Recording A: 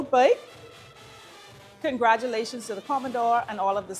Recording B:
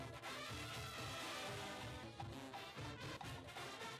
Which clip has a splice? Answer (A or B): B